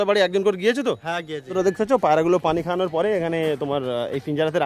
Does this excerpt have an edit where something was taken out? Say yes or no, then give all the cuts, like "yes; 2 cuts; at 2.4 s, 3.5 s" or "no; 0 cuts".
yes; 1 cut; at 1.5 s